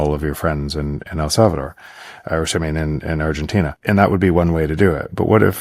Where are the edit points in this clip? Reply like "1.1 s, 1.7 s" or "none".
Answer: 3.8 s

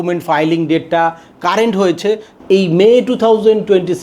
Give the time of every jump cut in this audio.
2.3 s

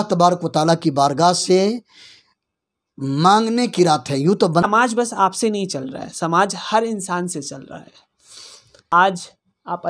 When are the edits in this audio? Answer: 4.6 s, 8.9 s

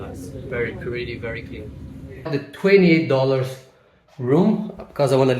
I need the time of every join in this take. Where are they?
2.3 s

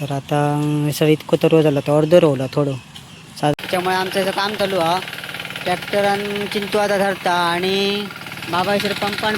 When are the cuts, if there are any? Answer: 3.5 s

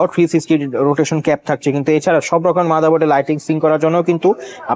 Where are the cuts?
none

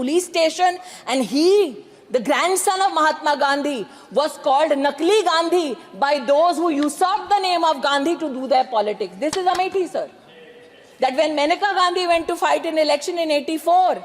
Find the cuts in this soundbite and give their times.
none

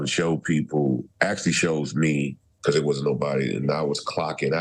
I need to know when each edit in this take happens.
1.1 s, 2.4 s

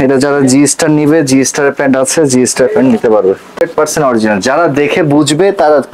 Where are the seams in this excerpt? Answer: 3.6 s

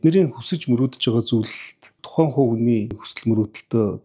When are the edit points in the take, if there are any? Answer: 2.0 s, 3.1 s

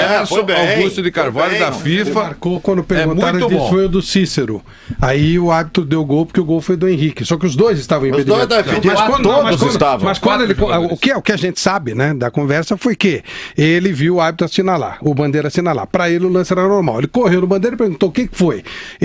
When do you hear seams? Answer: none

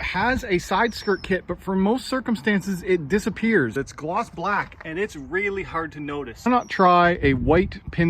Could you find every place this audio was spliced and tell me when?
3.7 s, 6.5 s

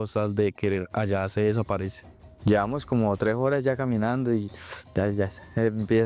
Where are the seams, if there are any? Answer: none

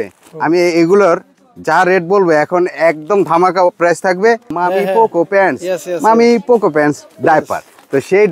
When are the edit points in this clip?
4.5 s

